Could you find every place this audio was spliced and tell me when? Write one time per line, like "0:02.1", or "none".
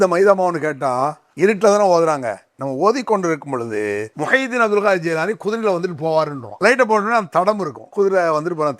0:01.2
0:04.1
0:06.4
0:07.8